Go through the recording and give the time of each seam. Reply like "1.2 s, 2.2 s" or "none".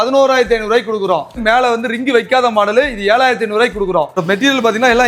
1.4 s, 4.2 s